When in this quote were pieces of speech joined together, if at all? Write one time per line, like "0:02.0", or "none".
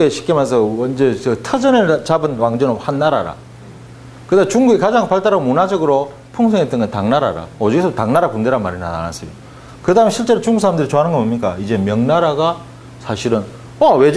0:05.7